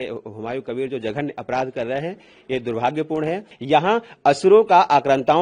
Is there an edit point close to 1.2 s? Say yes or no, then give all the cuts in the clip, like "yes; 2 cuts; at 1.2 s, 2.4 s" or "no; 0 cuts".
no; 1 cut; at 3.5 s